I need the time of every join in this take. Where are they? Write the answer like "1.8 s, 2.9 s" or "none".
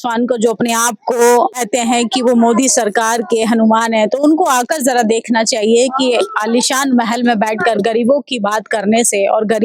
1.6 s